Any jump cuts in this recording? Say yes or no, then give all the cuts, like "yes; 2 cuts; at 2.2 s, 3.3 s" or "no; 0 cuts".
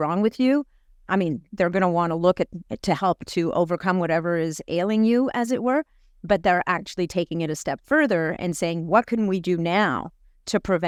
no; 0 cuts